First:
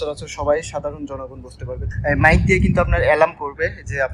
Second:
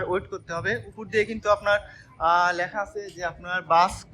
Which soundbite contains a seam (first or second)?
first